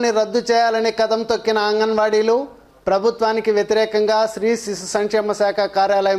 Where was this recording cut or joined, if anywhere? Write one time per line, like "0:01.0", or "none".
none